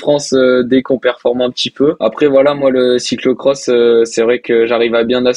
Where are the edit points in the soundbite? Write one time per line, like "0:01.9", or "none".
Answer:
0:00.9
0:02.0